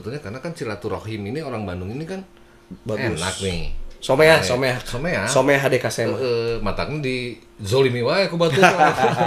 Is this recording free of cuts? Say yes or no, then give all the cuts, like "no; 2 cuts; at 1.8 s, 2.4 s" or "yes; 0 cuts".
yes; 0 cuts